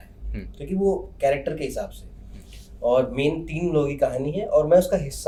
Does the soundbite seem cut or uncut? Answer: uncut